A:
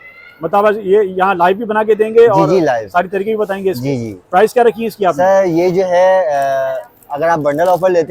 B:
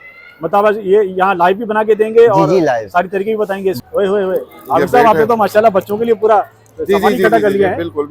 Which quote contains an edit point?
B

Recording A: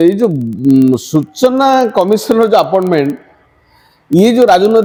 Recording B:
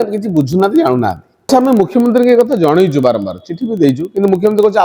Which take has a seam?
B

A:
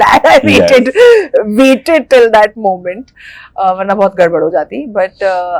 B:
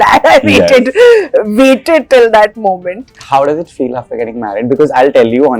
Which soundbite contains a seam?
B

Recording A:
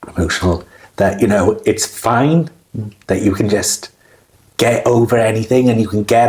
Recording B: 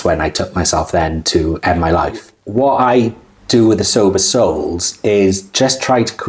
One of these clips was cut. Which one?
B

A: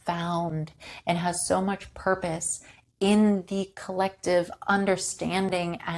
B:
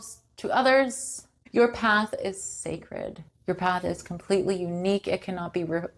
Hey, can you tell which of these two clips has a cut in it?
B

